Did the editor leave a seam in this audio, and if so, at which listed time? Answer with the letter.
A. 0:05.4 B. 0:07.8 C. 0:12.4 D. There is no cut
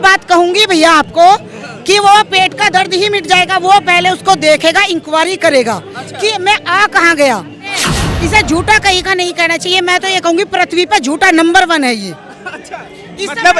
B